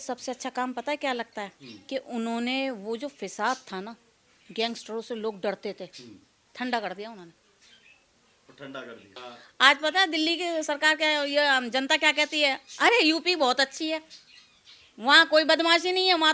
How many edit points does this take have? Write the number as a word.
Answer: one